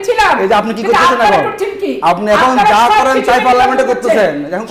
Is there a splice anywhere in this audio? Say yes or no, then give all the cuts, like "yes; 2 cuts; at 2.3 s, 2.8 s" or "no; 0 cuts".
no; 0 cuts